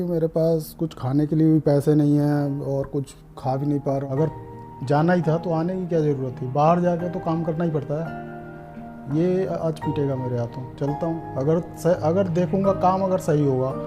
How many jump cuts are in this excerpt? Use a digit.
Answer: 1